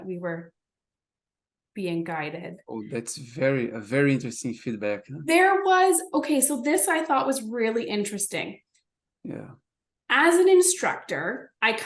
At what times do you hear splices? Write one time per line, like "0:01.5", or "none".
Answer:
none